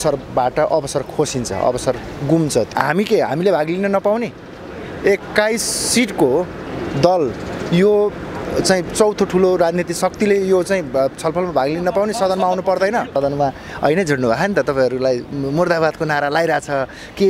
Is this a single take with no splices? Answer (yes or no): no